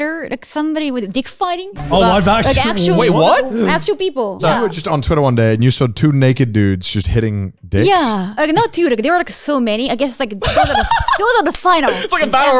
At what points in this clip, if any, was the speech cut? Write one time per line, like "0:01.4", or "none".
0:01.7
0:04.4
0:08.3